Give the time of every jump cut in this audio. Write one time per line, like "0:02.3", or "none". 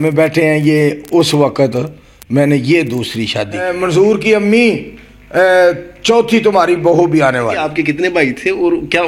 0:03.7
0:07.6